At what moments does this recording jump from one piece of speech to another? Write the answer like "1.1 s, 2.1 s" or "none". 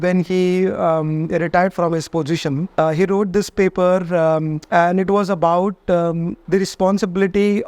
2.7 s, 4.6 s, 6.3 s